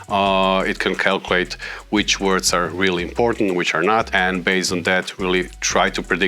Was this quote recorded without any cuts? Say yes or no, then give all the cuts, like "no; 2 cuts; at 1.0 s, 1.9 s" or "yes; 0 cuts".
no; 1 cut; at 4.1 s